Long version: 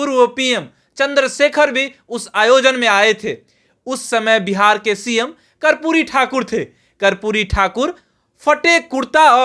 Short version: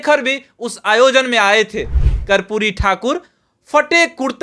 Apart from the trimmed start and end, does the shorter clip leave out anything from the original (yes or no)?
yes